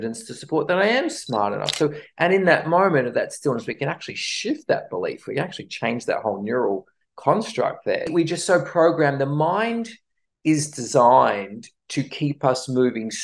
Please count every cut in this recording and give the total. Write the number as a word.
one